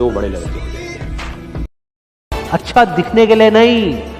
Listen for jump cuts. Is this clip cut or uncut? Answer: cut